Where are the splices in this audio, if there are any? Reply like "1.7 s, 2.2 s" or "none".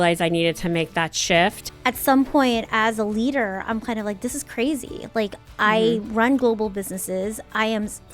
1.6 s